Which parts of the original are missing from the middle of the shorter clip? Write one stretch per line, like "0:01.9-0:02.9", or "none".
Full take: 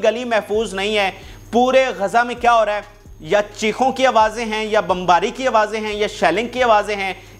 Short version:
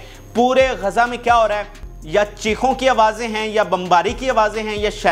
none